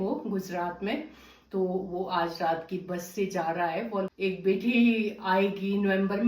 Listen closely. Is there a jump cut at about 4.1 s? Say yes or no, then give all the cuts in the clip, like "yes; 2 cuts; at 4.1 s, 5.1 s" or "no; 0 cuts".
yes; 1 cut; at 4.1 s